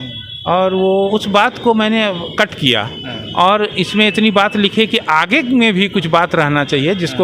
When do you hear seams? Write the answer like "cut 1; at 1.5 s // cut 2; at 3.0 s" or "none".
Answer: cut 1; at 1.1 s